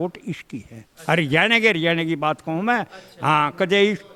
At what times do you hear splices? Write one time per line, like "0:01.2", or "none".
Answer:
none